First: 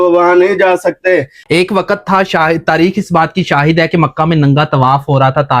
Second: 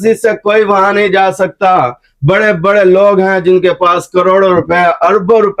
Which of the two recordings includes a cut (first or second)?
first